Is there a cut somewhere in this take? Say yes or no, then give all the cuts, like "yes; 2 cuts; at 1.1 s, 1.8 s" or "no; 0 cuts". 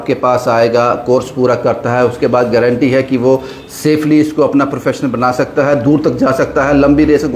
no; 0 cuts